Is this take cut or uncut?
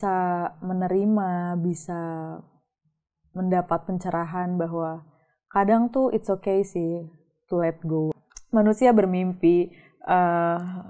cut